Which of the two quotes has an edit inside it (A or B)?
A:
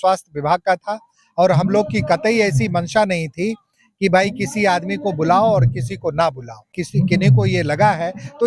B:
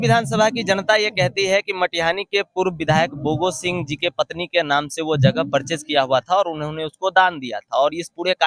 A